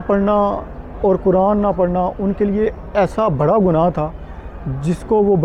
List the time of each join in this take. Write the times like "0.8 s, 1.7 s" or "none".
none